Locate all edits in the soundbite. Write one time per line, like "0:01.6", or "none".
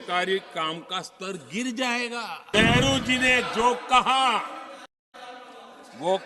0:02.5